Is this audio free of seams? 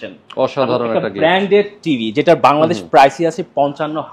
yes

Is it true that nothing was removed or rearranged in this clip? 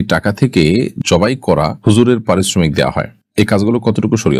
yes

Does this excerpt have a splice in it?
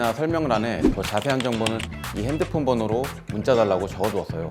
no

